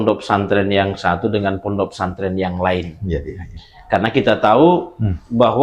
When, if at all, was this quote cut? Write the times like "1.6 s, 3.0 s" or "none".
none